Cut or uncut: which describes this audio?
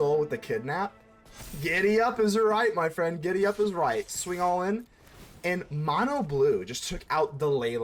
uncut